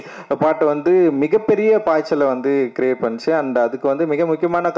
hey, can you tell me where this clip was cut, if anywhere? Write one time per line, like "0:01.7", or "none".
none